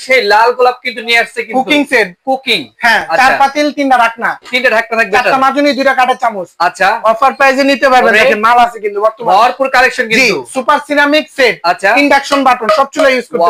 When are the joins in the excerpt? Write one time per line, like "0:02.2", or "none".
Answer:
none